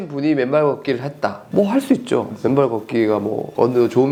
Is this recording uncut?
yes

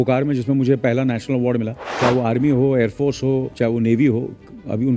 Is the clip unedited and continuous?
no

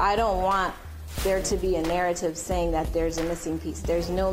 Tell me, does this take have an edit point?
no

